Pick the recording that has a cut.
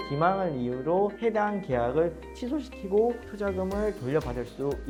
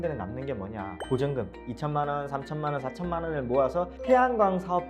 second; 2 cuts; at 0.9 s, 4.0 s

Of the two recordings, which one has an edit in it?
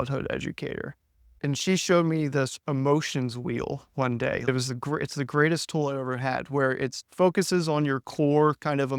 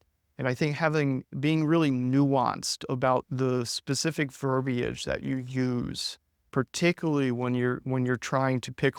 first; 3 cuts; at 1.4 s, 4.5 s, 7.0 s

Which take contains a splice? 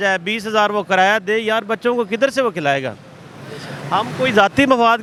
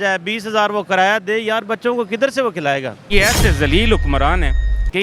second; 1 cut; at 3.2 s

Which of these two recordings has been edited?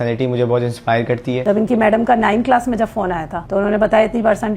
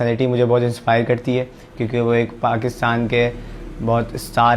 first; 2 cuts; at 1.4 s, 3.3 s

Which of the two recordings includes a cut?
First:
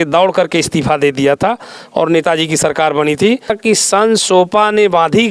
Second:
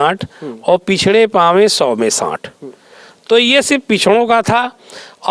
first; 1 cut; at 3.6 s

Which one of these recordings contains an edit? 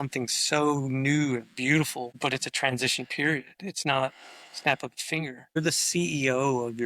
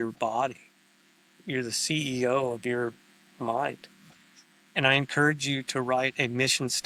first; 2 cuts; at 2.1 s, 5.6 s

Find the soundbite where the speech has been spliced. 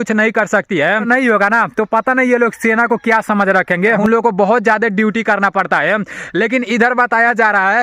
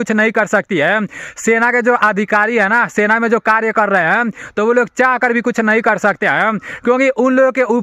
first; 2 cuts; at 1.0 s, 4.0 s

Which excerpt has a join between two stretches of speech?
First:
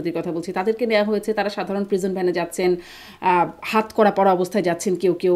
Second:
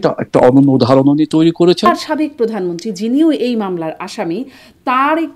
second; 1 cut; at 1.9 s

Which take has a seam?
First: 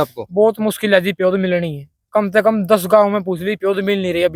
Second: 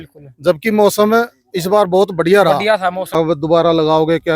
second; 1 cut; at 3.1 s

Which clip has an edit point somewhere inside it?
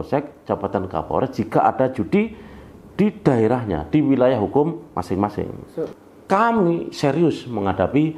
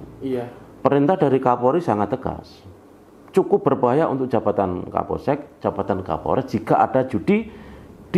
first; 1 cut; at 5.6 s

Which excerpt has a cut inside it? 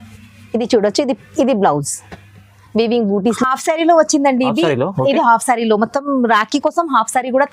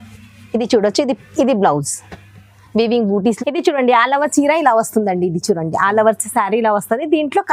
first; 1 cut; at 3.4 s

